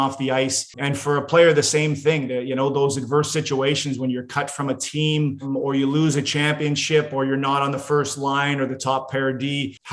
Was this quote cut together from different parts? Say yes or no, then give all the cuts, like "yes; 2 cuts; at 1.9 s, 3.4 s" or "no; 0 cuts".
no; 0 cuts